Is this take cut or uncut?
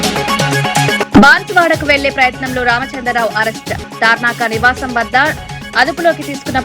cut